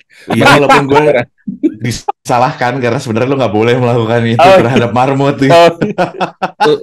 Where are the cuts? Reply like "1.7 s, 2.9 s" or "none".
none